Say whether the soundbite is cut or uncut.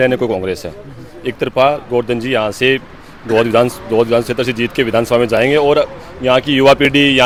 uncut